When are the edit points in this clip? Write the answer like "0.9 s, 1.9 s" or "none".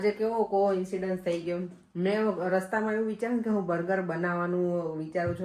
none